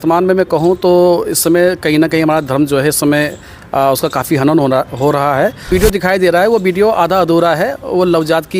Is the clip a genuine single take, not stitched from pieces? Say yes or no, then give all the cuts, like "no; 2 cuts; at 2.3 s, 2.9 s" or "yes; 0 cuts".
no; 1 cut; at 5.7 s